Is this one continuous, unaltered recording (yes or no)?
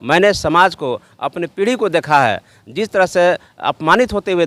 yes